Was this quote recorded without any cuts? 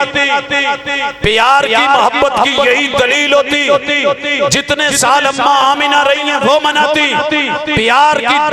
yes; 0 cuts

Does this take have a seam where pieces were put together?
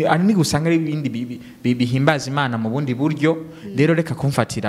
no; 0 cuts

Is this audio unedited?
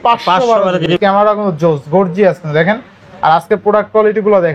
no; 1 cut; at 0.9 s

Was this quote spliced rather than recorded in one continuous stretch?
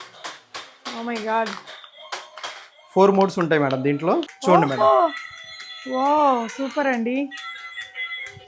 yes; 1 cut; at 4.3 s

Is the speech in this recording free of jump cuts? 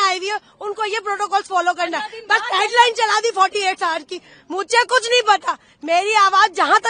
yes; 0 cuts

